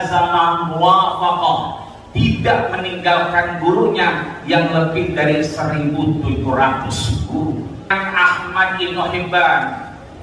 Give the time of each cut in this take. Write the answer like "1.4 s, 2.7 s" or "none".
7.9 s